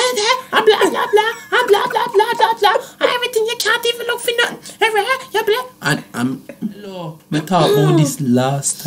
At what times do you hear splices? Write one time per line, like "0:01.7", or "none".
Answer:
0:07.2

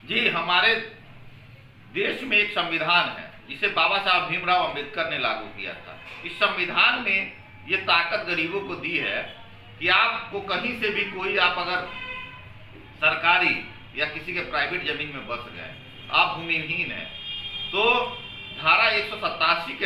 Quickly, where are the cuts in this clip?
none

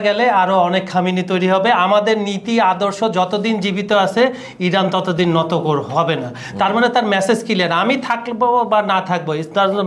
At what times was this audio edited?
none

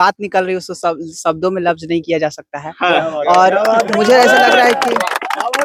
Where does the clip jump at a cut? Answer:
none

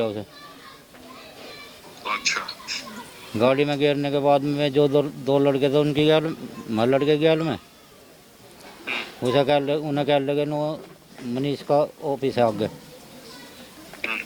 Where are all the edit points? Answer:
none

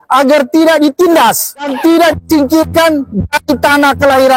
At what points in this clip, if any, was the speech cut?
0:01.7

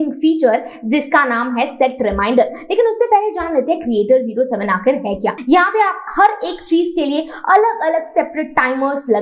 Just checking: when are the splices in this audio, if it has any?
0:05.3

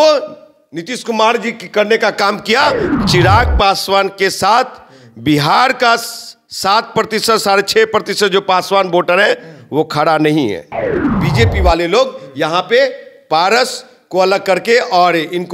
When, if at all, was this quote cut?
0:03.0
0:11.2

